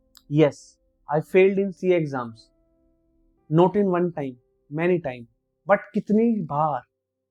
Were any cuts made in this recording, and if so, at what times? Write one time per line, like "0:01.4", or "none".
none